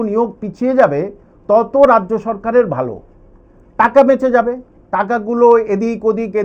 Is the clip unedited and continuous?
yes; 0 cuts

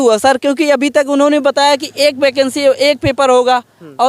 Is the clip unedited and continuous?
yes; 0 cuts

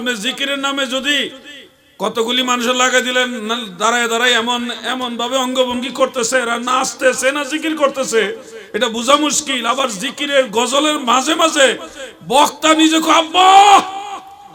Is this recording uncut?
yes; 0 cuts

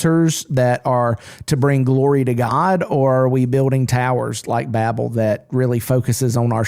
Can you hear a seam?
no; 0 cuts

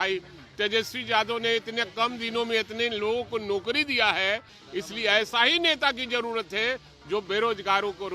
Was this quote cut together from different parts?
yes; 1 cut; at 4.6 s

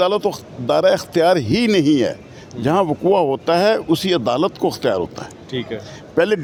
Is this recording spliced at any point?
no; 0 cuts

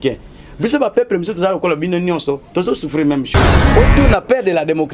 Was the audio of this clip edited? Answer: yes; 1 cut; at 3.6 s

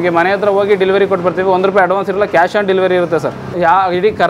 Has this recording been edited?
no; 0 cuts

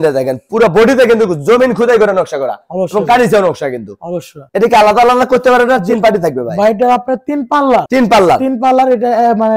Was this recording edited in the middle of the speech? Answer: no; 0 cuts

